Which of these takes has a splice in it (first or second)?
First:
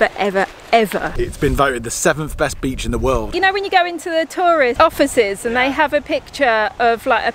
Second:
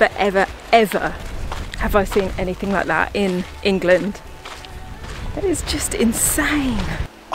first